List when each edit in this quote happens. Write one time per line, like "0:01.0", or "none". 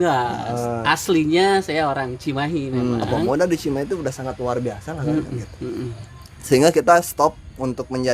0:03.2